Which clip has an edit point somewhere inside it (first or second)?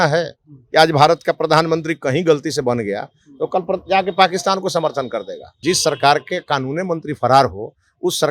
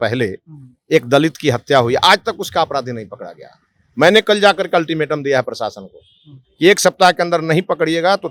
first